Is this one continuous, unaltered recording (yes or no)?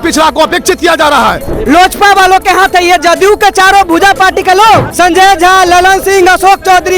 no